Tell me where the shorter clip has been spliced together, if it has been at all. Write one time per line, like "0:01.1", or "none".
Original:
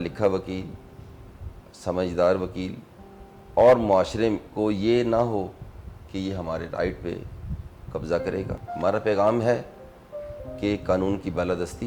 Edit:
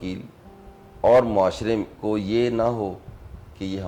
none